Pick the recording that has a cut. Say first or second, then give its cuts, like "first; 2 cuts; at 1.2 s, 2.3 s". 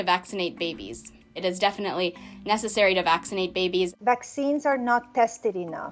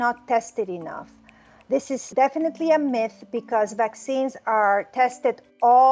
first; 2 cuts; at 1.3 s, 3.9 s